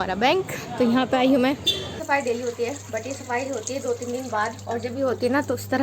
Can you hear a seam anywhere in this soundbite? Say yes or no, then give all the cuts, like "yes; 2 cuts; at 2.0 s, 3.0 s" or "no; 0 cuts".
yes; 1 cut; at 1.9 s